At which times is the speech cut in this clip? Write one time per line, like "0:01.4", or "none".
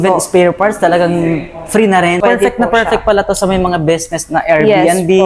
0:02.2